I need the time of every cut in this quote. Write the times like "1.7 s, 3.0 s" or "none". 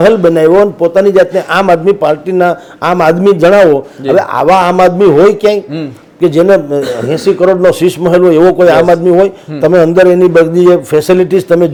none